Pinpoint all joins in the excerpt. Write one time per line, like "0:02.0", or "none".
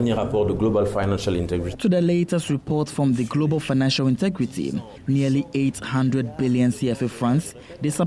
0:01.7
0:04.9